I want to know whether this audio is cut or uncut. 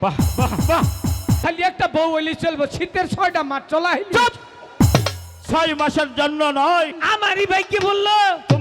cut